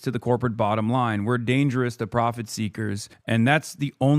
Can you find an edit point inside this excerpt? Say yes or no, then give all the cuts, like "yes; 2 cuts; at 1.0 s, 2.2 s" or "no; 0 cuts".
yes; 1 cut; at 3.1 s